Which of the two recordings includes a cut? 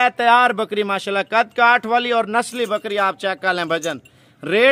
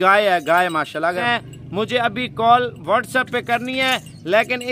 second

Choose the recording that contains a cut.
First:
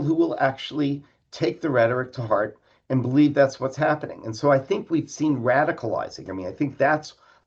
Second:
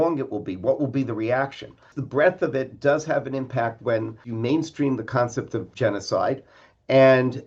second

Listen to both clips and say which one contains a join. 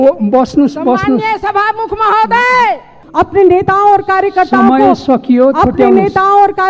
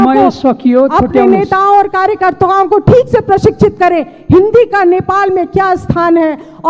first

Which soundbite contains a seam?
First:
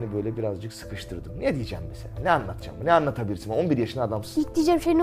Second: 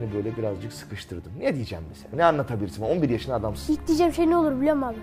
second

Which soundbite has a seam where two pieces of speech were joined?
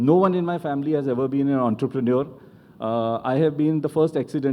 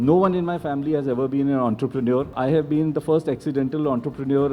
second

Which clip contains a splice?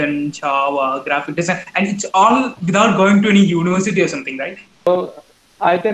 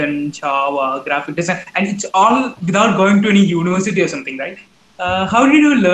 first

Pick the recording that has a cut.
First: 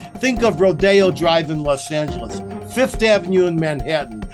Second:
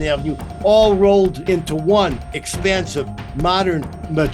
second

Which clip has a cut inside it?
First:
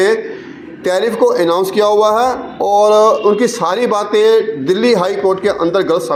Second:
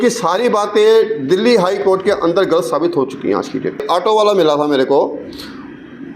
second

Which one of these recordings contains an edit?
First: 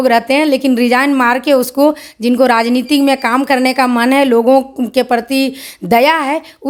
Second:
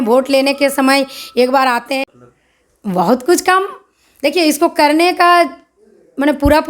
second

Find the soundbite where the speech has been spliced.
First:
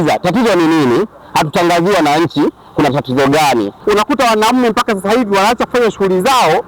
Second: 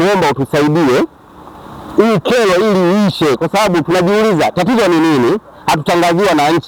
first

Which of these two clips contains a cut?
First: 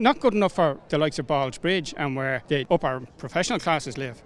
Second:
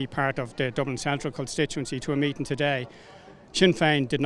first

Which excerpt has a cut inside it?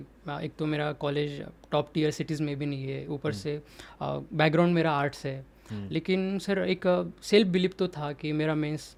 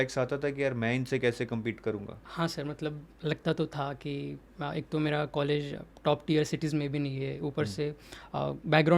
second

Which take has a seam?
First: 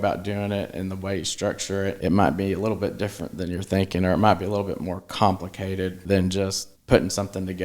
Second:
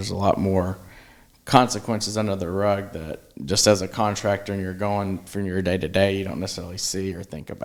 first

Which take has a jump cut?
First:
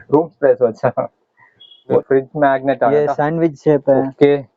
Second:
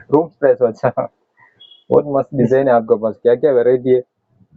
first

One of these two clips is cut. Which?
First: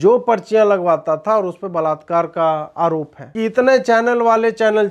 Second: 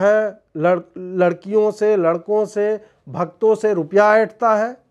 first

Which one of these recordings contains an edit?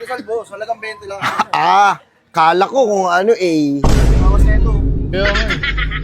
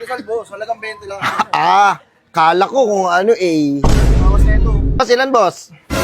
second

